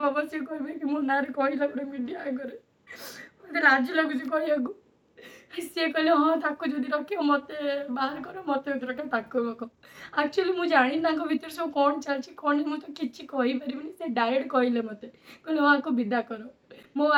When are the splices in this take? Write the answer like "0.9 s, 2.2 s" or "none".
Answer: none